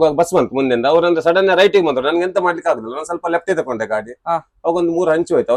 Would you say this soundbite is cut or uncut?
uncut